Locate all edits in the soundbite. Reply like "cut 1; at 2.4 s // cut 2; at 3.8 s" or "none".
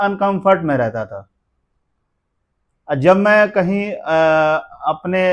none